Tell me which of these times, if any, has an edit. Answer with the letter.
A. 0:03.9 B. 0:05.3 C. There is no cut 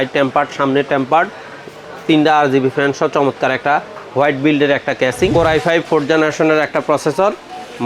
B